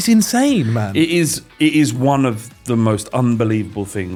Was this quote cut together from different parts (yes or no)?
no